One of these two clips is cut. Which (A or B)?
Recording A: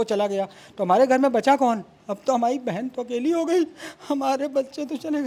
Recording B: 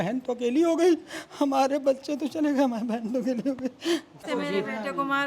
B